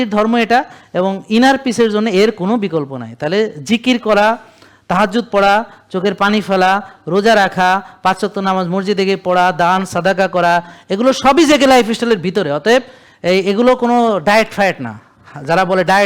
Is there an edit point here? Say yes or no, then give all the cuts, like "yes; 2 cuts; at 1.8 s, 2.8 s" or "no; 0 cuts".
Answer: no; 0 cuts